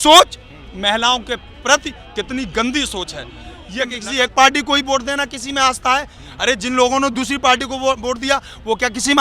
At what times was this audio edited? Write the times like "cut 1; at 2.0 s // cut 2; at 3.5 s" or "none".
cut 1; at 3.9 s